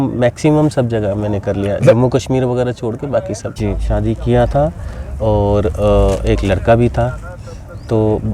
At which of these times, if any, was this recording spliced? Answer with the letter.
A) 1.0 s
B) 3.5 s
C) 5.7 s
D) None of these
B